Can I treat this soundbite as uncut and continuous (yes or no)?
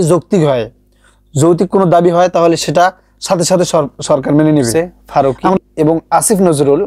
no